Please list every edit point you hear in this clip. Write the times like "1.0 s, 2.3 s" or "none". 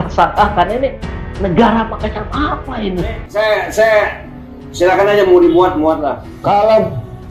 3.2 s, 6.3 s